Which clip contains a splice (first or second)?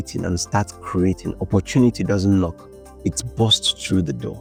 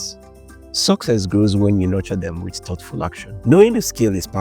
second